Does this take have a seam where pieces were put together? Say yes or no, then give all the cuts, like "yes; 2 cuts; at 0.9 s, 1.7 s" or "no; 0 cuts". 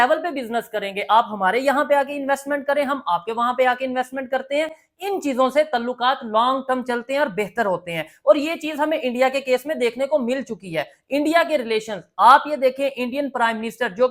no; 0 cuts